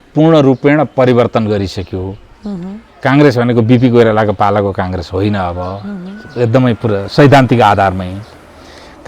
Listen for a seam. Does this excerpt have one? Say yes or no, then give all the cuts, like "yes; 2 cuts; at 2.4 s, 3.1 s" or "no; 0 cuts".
no; 0 cuts